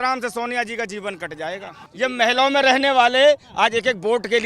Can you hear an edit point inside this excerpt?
yes; 1 cut; at 1.8 s

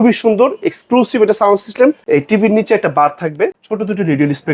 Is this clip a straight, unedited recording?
no; 2 cuts; at 2.0 s, 3.6 s

